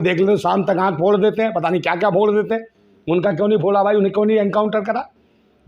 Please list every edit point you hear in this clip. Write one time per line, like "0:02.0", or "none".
none